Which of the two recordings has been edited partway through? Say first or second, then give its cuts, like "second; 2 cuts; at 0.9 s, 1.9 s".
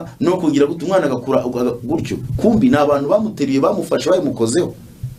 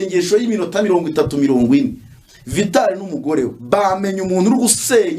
second; 1 cut; at 3.6 s